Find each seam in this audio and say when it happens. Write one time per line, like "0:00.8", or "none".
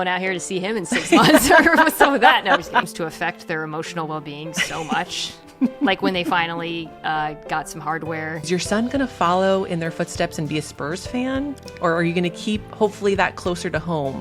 0:03.0
0:08.5